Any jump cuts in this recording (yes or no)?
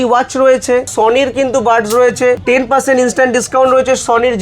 yes